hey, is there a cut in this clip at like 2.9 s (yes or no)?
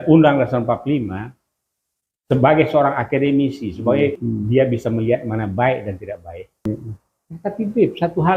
no